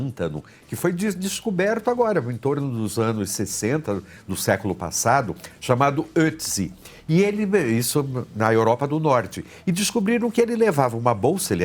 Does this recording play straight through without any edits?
yes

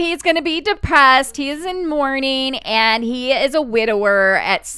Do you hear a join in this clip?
no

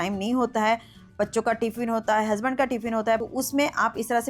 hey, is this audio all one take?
no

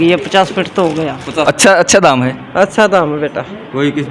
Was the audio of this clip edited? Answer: yes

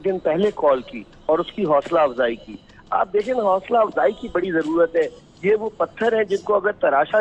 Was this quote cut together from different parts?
no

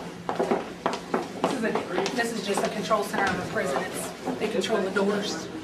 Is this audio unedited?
yes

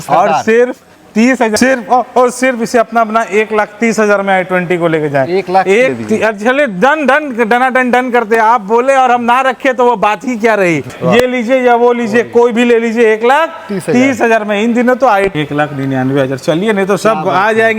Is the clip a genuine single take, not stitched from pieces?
no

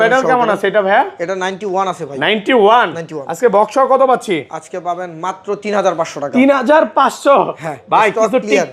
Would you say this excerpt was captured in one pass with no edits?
yes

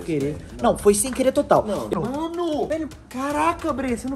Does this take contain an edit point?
yes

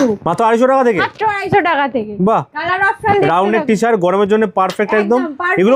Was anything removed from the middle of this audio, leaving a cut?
no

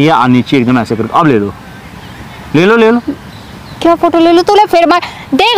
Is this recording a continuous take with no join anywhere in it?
yes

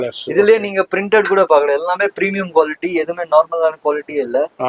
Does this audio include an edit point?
no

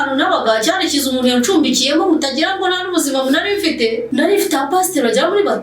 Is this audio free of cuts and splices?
no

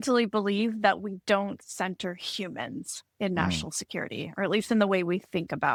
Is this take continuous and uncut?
yes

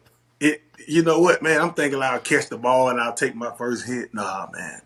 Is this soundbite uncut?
yes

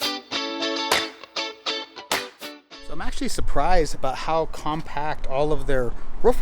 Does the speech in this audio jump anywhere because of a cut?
yes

